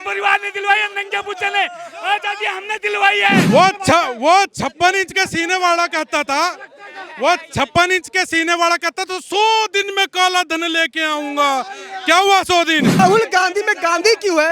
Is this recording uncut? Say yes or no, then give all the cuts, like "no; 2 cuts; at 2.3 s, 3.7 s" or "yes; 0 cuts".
no; 2 cuts; at 3.4 s, 13.0 s